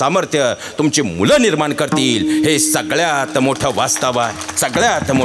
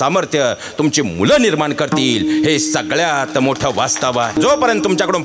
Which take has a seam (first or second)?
second